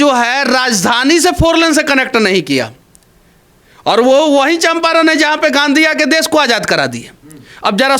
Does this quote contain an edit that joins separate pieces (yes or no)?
no